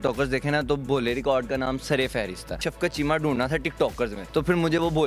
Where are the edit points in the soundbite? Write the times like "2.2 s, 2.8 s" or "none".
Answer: 2.7 s, 4.2 s